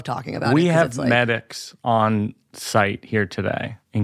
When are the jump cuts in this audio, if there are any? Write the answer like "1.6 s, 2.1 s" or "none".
none